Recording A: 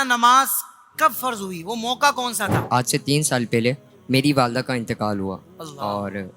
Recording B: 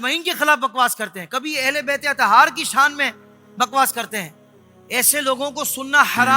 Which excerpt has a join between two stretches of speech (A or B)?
A